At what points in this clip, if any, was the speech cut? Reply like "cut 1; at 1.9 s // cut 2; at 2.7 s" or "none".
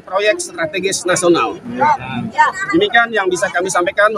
none